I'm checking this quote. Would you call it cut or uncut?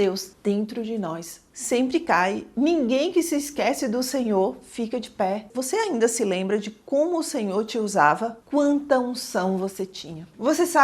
cut